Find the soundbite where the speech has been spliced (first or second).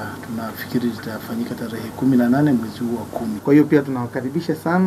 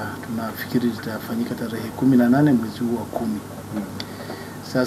first